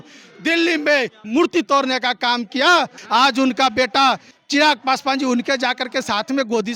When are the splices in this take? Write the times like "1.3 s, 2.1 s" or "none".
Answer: 3.0 s, 4.3 s